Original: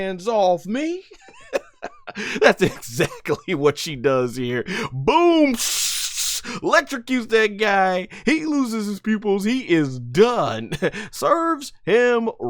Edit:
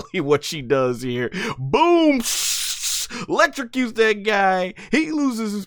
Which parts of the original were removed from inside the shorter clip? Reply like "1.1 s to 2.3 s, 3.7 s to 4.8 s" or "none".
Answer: none